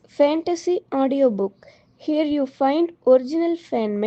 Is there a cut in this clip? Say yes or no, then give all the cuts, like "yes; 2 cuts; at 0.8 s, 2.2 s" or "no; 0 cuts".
no; 0 cuts